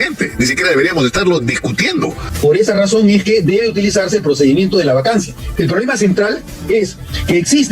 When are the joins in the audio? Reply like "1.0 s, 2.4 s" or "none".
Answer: 2.2 s, 5.4 s